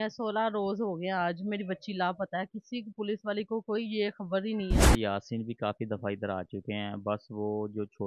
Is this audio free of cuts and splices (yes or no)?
no